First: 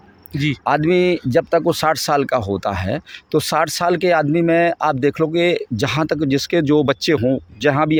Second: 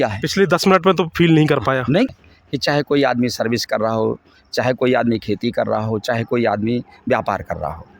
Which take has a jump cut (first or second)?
second